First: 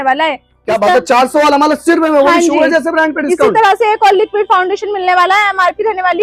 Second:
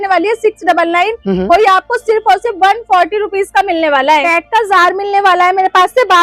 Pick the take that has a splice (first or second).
second